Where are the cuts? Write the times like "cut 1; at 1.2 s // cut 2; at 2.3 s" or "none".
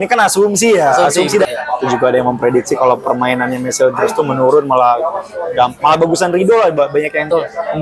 cut 1; at 1.5 s